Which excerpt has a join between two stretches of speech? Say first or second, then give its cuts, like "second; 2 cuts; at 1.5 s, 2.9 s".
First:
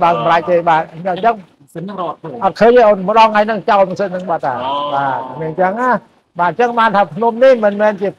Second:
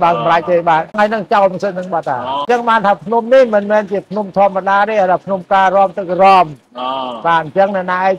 second; 2 cuts; at 1.0 s, 2.4 s